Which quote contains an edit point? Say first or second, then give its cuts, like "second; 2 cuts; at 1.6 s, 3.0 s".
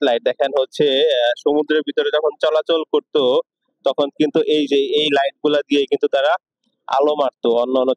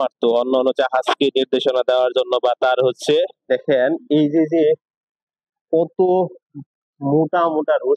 second; 1 cut; at 3.5 s